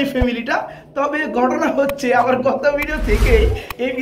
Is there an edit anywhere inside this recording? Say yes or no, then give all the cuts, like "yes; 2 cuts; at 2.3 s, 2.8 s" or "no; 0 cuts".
no; 0 cuts